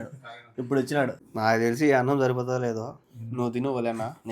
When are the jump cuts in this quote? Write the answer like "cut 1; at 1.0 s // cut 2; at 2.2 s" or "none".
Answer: cut 1; at 1.2 s